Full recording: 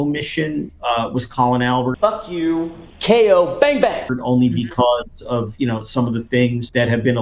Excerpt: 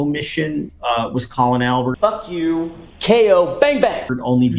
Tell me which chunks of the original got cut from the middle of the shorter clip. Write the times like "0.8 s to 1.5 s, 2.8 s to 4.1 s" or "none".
none